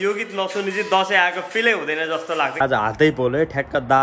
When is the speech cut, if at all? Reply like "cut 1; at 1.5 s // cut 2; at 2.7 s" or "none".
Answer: cut 1; at 2.7 s